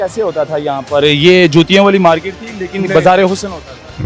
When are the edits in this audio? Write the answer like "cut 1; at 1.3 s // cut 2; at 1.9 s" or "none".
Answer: none